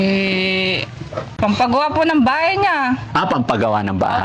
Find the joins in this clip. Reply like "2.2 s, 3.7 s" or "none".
1.2 s